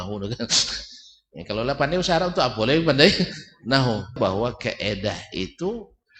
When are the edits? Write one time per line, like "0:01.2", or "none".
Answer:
0:04.2